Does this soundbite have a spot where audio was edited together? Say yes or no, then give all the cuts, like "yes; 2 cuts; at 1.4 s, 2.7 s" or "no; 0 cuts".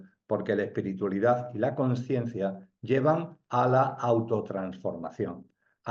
no; 0 cuts